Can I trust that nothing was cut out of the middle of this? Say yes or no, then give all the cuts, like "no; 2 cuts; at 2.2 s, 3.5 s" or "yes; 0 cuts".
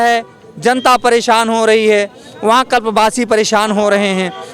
yes; 0 cuts